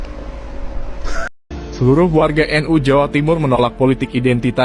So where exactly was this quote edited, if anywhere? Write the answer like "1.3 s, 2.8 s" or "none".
1.3 s